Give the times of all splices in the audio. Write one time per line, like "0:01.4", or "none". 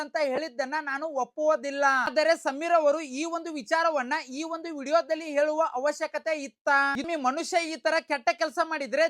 0:02.1
0:07.0